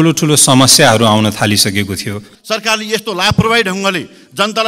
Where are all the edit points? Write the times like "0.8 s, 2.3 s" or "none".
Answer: 2.3 s